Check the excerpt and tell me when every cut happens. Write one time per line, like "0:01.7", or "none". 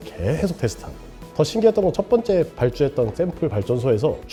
none